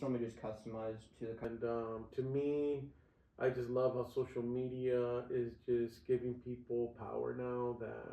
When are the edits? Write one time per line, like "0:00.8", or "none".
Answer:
0:01.4